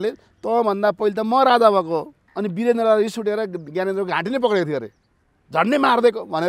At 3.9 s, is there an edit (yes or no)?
no